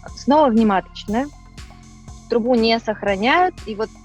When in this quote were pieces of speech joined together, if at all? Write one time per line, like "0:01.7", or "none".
none